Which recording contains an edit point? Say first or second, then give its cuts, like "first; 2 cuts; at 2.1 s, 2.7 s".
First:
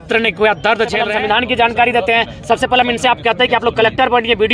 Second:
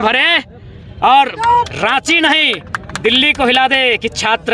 first; 1 cut; at 1.1 s